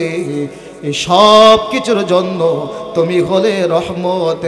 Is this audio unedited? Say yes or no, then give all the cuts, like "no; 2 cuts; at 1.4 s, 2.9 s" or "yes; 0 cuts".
yes; 0 cuts